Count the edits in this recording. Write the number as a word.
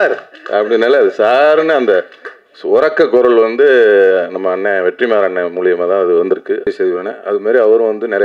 one